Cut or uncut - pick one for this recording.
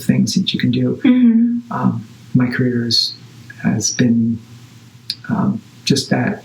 uncut